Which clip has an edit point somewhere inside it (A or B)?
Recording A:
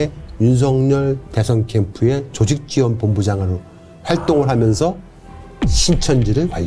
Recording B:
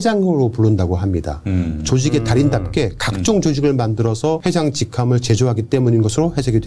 B